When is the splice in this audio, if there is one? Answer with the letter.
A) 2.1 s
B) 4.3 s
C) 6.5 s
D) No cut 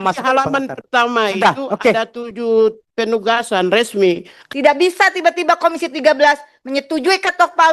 B